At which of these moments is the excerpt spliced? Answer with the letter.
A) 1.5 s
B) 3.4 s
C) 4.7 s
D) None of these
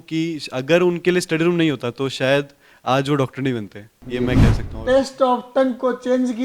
C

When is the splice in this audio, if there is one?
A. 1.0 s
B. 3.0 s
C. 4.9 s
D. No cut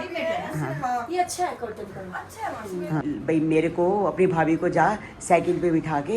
B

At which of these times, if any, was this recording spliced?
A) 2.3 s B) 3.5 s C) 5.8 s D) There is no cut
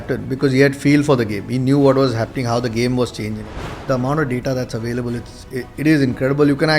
B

